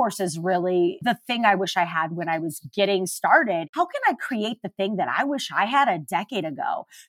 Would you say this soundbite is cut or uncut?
cut